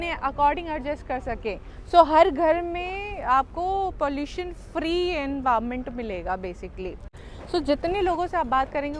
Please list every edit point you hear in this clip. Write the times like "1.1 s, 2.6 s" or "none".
7.3 s